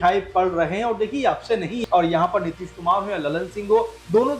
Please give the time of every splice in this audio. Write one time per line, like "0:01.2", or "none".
0:01.8